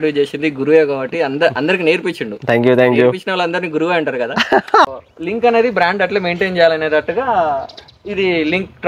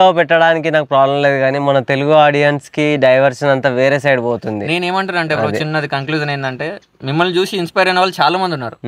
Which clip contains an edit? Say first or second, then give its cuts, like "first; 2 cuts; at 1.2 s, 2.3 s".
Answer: first; 1 cut; at 4.8 s